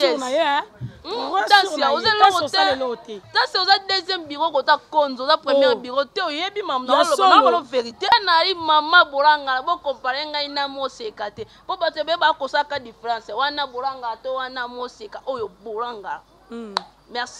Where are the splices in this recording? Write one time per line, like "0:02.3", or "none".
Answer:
0:08.1

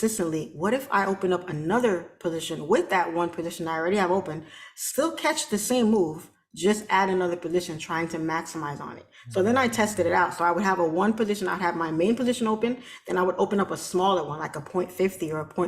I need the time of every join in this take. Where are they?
none

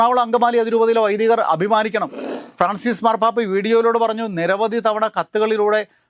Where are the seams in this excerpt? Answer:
0:02.2

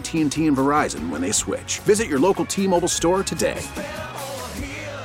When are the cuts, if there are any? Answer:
none

